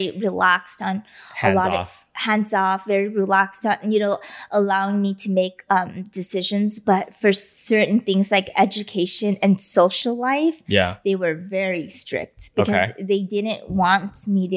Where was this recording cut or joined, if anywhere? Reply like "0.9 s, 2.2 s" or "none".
none